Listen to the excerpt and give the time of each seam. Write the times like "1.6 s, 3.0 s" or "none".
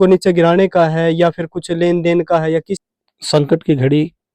2.7 s